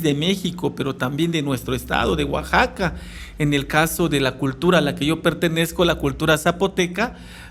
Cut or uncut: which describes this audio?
uncut